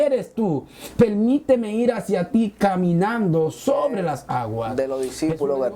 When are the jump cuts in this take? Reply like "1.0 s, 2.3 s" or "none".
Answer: 4.7 s